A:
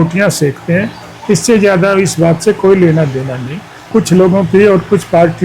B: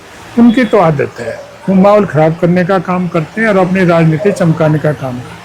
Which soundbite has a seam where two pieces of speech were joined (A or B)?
A